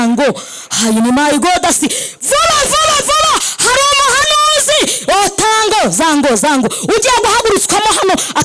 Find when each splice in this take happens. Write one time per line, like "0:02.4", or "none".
none

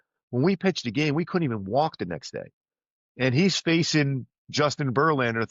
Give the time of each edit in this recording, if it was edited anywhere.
none

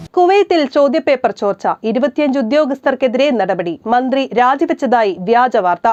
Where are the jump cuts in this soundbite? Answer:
none

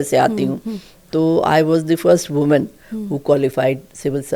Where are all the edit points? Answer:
none

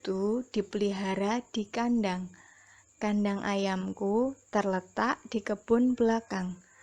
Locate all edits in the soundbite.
0:01.7

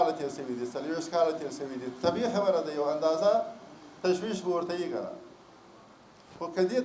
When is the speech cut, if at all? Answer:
none

